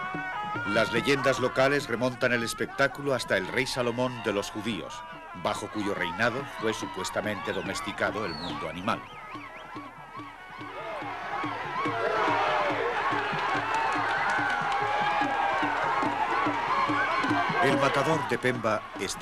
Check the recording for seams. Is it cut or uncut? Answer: cut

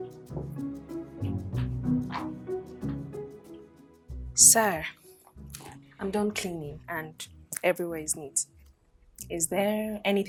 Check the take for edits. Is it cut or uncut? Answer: uncut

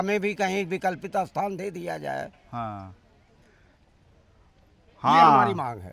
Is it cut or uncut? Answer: uncut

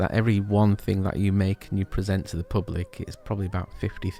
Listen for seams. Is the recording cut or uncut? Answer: uncut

